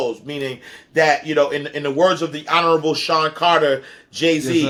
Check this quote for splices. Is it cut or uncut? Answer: uncut